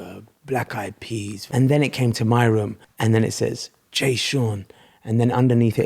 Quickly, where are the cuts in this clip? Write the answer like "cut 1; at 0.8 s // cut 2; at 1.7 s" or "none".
cut 1; at 1.4 s // cut 2; at 2.8 s